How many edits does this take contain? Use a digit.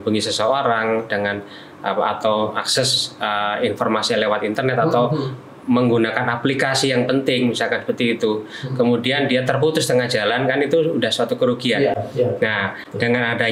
0